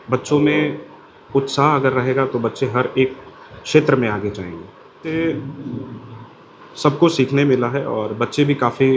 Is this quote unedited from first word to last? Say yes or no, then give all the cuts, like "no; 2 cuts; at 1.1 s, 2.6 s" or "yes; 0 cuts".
no; 1 cut; at 5.0 s